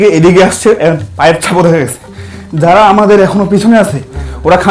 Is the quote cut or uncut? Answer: uncut